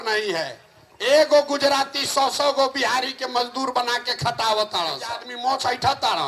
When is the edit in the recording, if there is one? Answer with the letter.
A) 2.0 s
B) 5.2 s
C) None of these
B